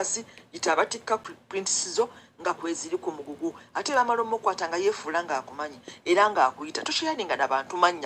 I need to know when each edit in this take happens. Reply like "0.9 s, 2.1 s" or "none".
1.2 s